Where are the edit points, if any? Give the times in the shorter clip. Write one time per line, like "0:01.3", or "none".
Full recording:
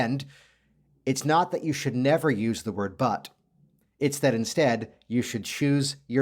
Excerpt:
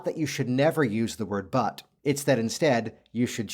0:01.9